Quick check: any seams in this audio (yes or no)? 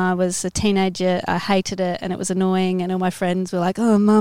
no